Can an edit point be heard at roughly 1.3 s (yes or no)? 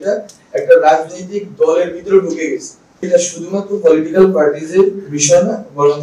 no